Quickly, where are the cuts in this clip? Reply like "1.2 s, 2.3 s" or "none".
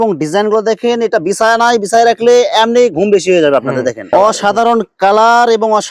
4.1 s